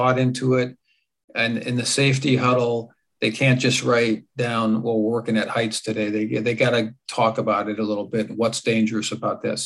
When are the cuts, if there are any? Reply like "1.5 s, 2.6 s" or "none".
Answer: none